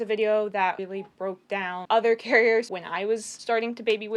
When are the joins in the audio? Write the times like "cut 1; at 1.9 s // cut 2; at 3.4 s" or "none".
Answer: cut 1; at 1.2 s // cut 2; at 2.8 s